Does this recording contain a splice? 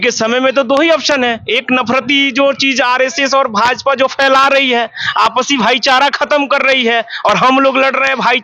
no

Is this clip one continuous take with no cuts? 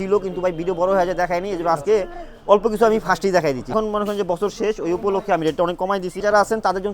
no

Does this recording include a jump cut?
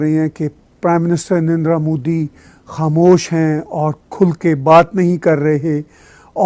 no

